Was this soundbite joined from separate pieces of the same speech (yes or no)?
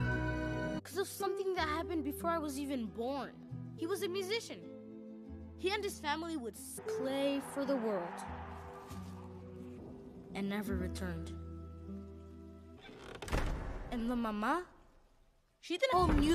no